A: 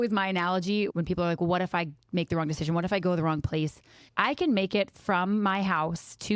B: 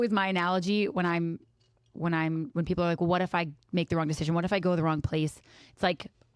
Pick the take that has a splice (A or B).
A